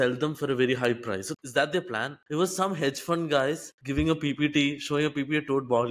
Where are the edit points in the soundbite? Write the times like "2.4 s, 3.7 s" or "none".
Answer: 2.2 s